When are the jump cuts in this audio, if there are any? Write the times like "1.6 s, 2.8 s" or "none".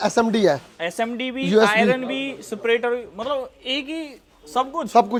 none

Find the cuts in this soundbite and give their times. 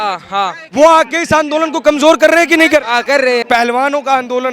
3.4 s

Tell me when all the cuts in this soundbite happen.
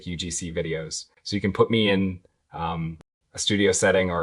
1.1 s

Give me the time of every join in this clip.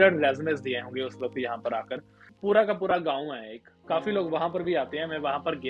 2.3 s

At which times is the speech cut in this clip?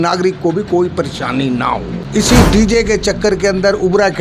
2.0 s

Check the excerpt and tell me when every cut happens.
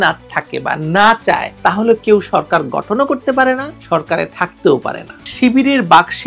5.3 s

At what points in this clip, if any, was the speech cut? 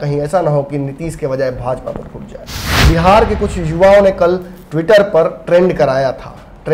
2.7 s

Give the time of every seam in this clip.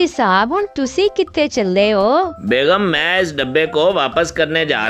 2.4 s

